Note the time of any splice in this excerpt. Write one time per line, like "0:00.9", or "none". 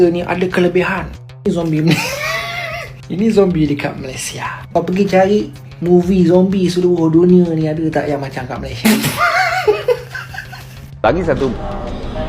0:08.8